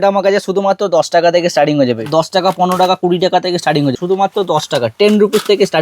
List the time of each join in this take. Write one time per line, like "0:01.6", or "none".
0:02.0
0:04.0